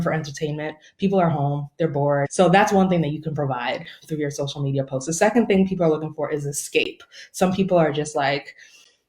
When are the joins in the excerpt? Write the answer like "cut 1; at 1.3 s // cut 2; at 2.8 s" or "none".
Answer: cut 1; at 2.3 s